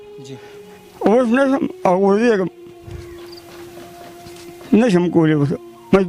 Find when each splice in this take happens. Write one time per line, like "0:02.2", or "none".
none